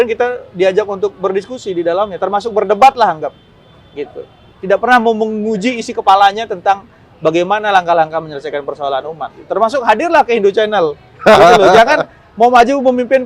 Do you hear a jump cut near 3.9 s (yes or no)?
no